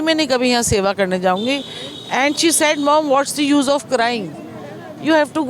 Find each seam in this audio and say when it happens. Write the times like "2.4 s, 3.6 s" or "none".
none